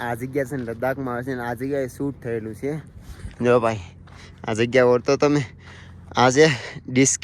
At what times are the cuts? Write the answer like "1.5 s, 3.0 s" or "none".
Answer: none